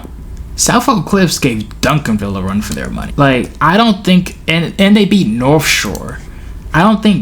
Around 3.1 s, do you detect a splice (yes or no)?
yes